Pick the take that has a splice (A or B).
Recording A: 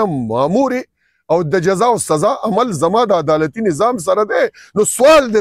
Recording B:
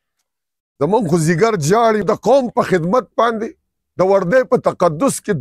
B